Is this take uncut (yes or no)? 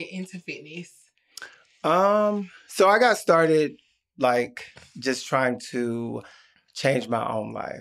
yes